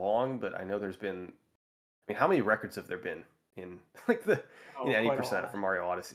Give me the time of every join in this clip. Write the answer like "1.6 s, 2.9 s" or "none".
none